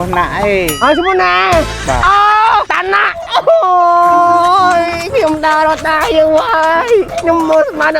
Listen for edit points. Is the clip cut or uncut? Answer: cut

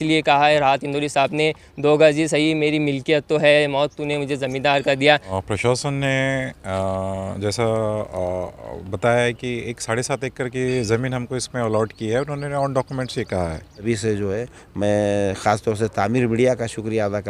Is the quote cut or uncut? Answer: cut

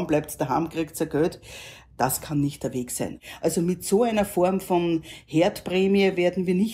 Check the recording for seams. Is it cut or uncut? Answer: cut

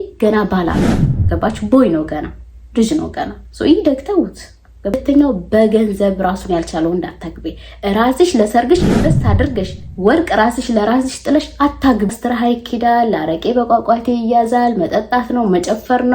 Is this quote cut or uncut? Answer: cut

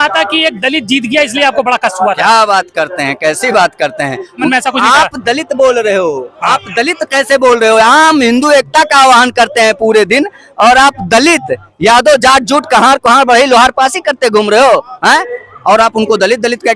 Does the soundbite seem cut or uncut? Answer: cut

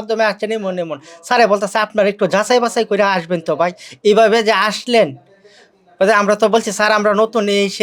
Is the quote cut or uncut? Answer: uncut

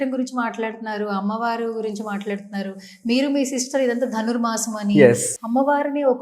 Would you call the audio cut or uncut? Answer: cut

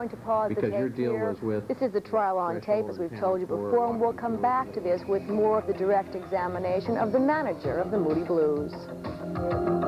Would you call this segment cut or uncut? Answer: uncut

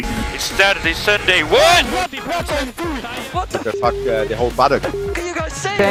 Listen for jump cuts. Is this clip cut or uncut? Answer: uncut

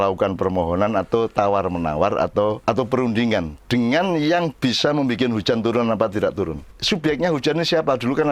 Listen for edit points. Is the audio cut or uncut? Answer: cut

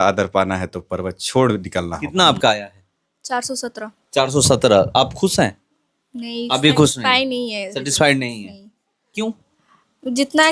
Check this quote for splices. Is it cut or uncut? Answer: cut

